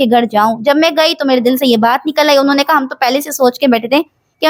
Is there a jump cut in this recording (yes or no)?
no